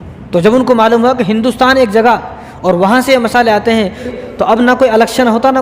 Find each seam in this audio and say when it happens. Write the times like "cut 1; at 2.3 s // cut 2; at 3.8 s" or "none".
cut 1; at 4.1 s